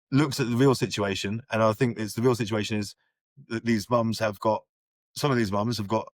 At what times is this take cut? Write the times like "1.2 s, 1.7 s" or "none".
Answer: none